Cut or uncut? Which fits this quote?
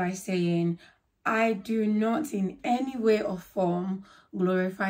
uncut